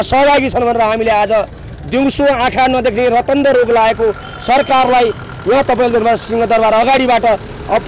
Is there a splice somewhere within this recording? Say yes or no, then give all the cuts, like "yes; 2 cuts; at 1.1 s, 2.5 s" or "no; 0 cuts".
no; 0 cuts